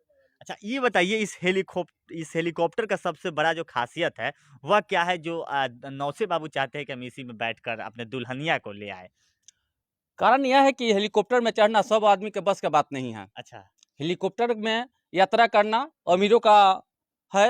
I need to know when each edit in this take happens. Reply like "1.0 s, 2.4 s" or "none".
none